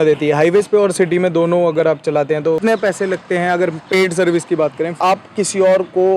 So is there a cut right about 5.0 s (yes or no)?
yes